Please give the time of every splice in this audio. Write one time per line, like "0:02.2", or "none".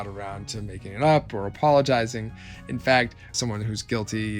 0:03.3